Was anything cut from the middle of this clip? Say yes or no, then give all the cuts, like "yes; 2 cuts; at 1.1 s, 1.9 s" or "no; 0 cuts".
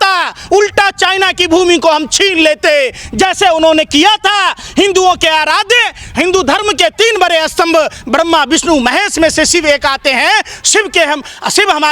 no; 0 cuts